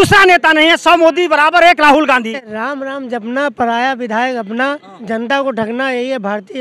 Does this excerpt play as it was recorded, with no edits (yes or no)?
no